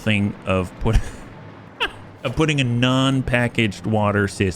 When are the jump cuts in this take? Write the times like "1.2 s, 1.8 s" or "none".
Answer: 2.1 s